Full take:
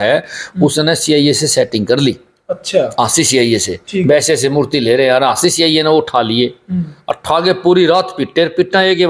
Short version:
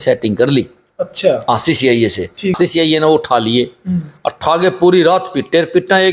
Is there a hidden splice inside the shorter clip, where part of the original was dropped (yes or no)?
yes